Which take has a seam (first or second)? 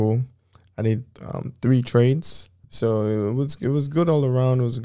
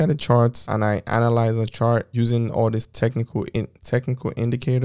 second